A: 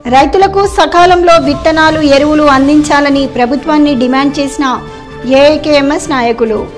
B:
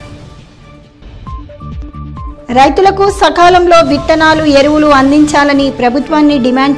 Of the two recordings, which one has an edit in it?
B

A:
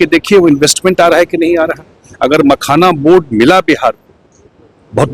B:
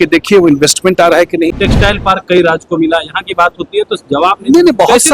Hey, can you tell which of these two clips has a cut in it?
B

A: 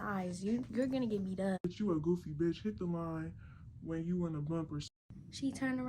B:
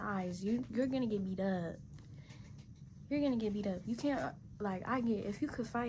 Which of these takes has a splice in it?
A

